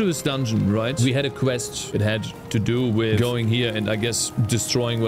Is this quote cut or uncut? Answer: cut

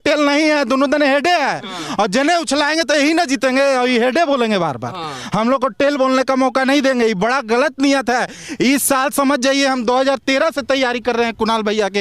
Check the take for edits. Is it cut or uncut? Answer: uncut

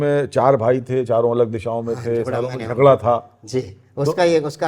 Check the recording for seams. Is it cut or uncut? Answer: uncut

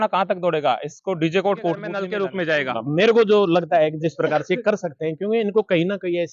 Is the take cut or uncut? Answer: cut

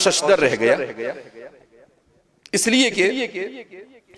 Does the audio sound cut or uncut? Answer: uncut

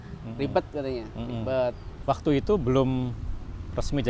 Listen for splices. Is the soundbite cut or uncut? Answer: cut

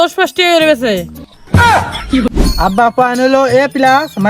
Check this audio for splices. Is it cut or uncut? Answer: cut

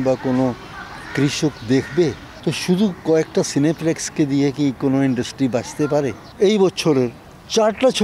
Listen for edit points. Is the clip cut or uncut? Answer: cut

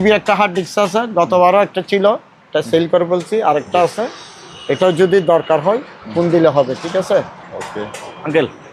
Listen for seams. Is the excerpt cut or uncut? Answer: uncut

